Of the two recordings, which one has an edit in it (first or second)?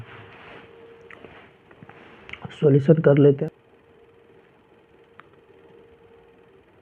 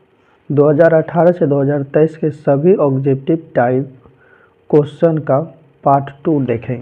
first